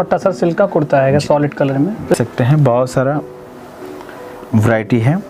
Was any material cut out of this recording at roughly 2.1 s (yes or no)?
yes